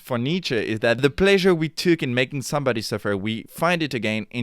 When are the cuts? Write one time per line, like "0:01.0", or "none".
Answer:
0:01.0